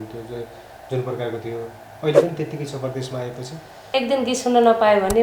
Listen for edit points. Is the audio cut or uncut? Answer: cut